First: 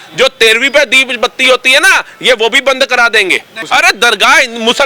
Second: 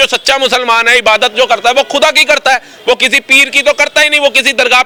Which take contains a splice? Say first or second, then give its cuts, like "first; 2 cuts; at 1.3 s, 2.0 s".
first; 1 cut; at 3.6 s